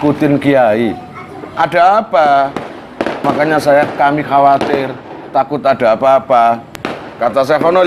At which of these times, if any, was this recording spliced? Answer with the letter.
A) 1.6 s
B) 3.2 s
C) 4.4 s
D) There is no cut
B